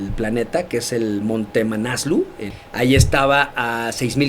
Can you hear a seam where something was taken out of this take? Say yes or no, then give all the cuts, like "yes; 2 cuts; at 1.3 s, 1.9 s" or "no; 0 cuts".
yes; 1 cut; at 2.4 s